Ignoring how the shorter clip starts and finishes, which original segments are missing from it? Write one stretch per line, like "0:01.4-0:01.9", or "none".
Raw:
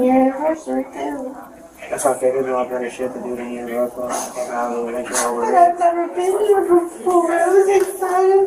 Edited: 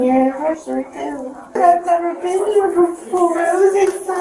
0:01.5-0:05.5

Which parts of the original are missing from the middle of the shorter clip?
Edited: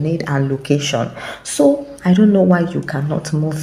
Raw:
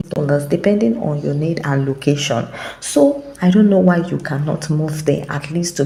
none

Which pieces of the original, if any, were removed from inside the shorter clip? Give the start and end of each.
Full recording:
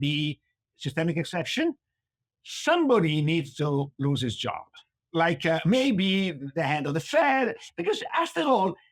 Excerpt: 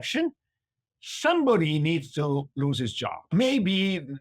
0:04.7-0:05.6

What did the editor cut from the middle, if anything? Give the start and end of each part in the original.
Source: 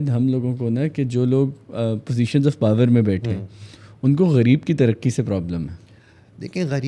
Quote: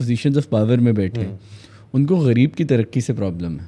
none

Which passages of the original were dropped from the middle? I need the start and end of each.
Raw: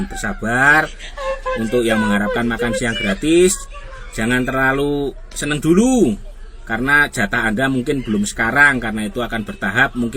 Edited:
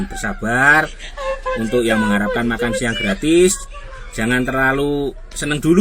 none

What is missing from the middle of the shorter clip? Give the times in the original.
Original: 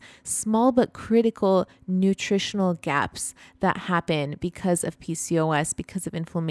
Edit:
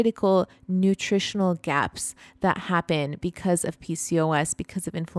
none

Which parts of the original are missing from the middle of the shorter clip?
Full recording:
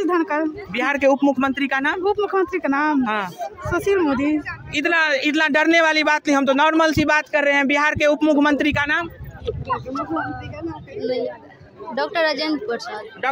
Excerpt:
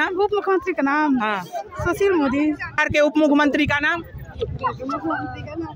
0:04.7-0:07.9

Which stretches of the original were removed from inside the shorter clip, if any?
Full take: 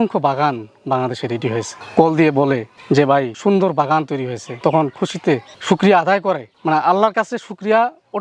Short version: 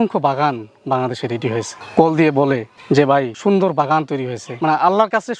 0:04.5-0:06.5

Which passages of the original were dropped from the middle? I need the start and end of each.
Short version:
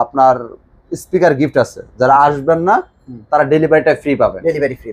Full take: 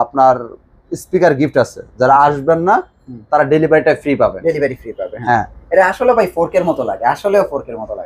none

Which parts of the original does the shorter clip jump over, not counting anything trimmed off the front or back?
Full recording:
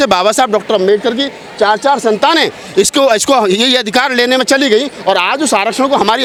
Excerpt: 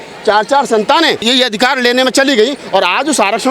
0:02.6-0:03.6

